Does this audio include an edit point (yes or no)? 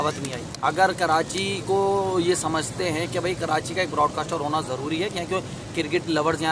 no